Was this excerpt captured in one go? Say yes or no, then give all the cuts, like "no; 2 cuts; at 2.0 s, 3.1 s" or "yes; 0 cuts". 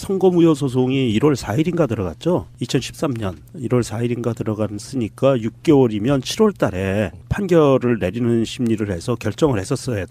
no; 1 cut; at 1.0 s